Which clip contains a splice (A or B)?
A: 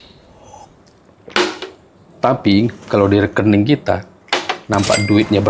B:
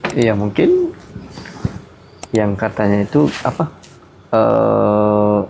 A